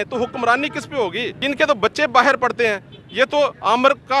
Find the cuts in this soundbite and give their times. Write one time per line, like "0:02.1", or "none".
0:01.3